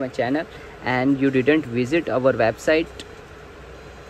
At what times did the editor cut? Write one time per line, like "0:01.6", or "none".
none

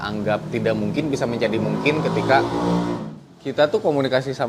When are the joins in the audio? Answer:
0:03.0

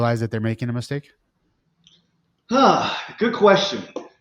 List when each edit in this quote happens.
none

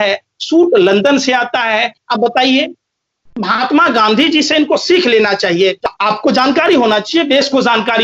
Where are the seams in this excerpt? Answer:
0:05.8

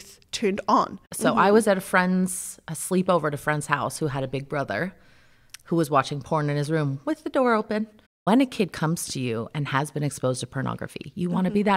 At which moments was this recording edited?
0:01.1
0:08.1

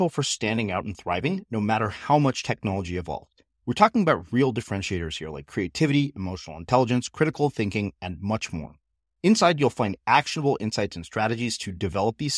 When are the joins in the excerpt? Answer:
none

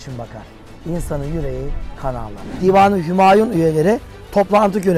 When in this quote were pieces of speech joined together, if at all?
0:02.5

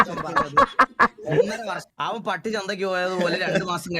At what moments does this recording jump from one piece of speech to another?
0:01.9

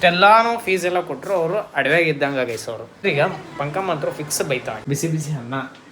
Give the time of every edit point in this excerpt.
0:03.0
0:04.7

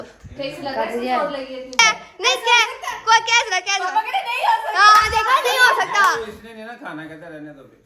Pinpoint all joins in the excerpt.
0:01.8

